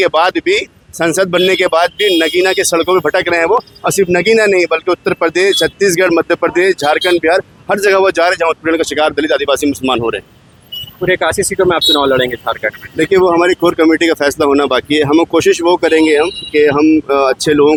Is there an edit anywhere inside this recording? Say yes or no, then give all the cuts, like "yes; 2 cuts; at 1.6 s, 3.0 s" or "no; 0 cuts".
no; 0 cuts